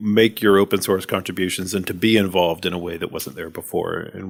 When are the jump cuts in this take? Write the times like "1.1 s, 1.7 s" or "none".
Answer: none

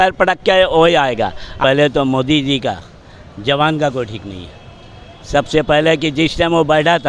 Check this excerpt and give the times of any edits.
1.6 s

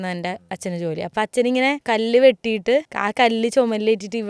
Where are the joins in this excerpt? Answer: 1.1 s, 1.8 s, 3.0 s

